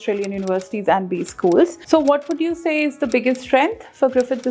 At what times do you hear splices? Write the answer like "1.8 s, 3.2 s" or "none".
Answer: 1.8 s